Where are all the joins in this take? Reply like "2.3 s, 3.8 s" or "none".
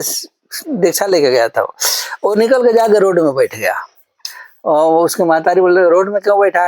none